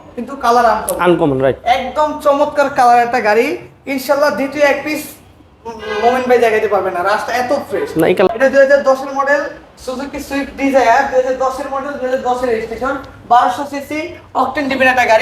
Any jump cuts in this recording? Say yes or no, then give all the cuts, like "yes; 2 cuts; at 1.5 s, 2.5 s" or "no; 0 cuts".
yes; 1 cut; at 8.3 s